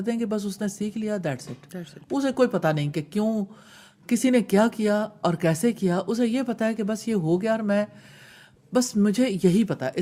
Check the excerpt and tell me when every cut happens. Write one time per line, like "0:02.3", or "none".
none